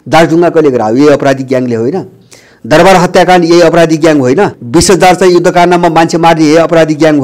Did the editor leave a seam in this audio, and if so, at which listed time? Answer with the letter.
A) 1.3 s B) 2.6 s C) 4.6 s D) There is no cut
C